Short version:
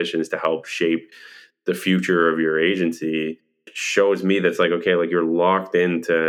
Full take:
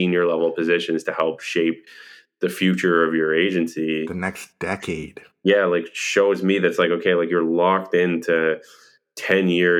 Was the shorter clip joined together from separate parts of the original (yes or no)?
yes